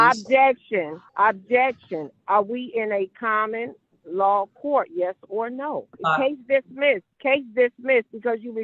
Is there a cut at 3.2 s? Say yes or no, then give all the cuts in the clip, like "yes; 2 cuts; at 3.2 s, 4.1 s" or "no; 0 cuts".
no; 3 cuts; at 1.0 s, 5.9 s, 7.1 s